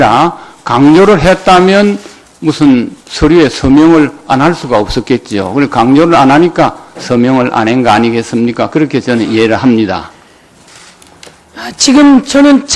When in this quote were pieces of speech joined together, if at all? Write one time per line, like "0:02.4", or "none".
0:10.1